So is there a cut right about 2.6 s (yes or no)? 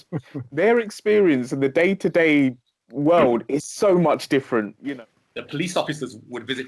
no